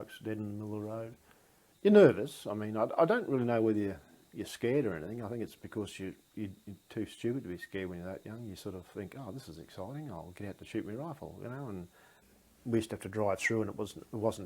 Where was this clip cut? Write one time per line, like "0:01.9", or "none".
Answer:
0:01.7
0:12.3